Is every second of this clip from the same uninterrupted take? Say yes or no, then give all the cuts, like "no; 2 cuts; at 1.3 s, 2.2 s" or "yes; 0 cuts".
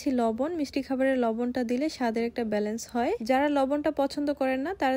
yes; 0 cuts